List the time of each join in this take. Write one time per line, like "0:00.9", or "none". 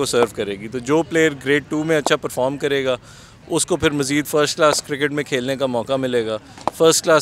none